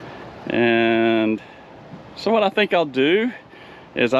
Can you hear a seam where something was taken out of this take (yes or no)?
no